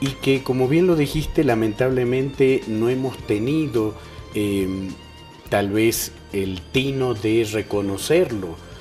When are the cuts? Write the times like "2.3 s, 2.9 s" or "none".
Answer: 3.0 s